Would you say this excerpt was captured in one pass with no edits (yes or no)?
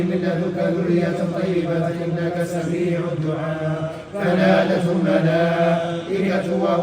yes